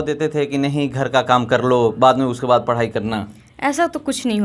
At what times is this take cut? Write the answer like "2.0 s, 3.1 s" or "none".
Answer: none

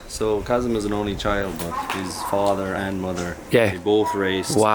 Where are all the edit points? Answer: none

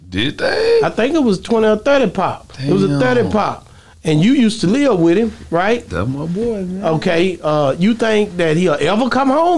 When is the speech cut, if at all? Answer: none

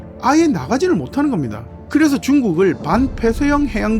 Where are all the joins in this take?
1.7 s

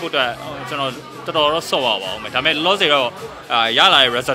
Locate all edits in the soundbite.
none

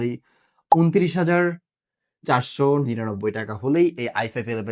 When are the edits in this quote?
none

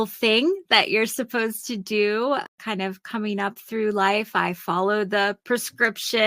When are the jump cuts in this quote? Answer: 2.5 s

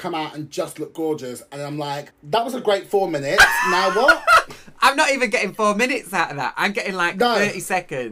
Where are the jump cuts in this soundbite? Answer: 2.1 s

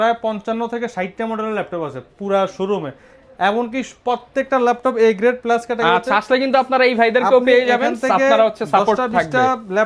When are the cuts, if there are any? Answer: none

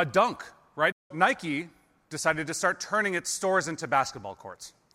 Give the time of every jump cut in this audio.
1.1 s

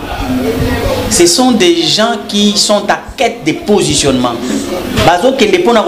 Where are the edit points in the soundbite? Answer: none

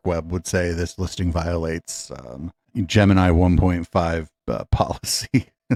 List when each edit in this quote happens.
none

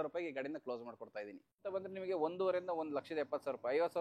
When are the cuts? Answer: 1.7 s

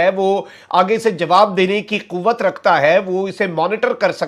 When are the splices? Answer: none

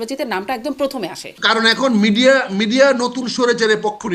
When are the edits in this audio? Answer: 1.3 s

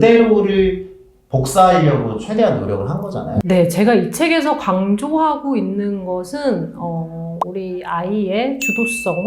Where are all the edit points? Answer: 3.4 s

